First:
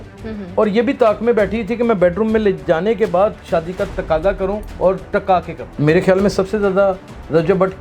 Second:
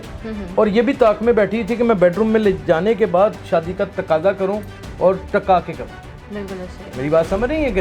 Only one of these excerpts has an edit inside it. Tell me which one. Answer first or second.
first